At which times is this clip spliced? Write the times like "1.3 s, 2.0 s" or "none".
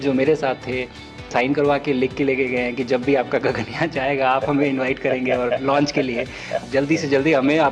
1.3 s, 6.6 s